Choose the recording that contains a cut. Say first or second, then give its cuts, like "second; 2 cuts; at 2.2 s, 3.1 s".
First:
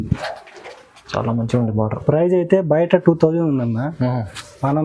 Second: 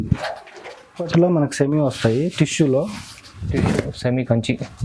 second; 1 cut; at 1.1 s